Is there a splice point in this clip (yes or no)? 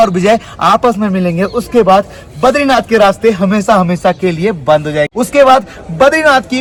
no